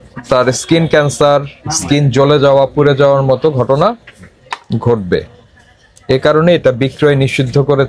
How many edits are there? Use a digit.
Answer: 0